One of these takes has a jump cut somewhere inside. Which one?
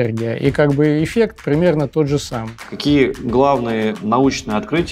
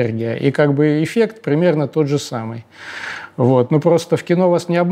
first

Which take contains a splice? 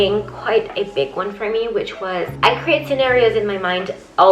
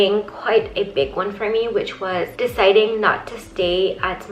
first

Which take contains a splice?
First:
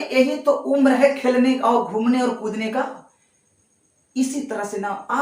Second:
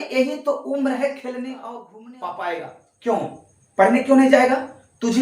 second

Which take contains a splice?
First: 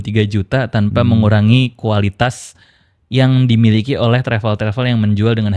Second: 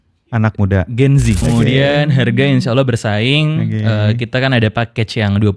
second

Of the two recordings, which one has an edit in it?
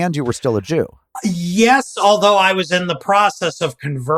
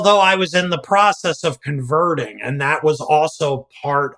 first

